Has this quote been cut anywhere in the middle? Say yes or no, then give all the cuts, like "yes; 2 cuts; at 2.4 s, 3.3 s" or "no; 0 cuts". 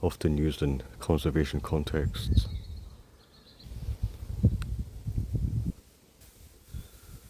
yes; 1 cut; at 6.2 s